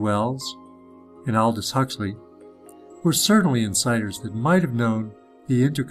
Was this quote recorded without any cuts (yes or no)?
no